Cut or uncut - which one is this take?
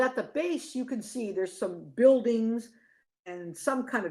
uncut